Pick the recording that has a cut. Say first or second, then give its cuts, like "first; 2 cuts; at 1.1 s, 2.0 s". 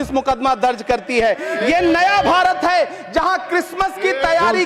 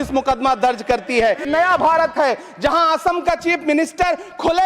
second; 1 cut; at 1.5 s